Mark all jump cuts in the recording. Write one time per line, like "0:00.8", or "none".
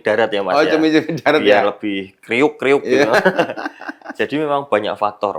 none